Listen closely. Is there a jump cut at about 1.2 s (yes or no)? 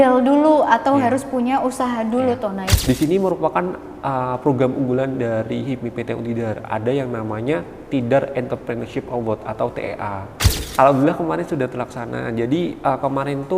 no